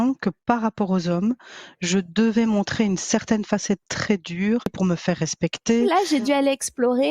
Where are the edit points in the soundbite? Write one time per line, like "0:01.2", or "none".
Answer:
0:04.7
0:05.9